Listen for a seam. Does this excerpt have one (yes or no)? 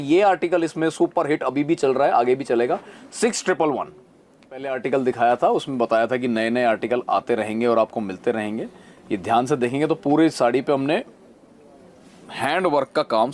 yes